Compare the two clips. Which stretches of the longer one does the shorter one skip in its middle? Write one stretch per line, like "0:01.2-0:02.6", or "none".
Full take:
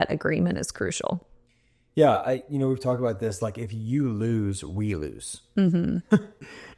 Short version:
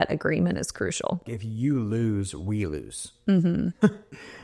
0:01.4-0:03.7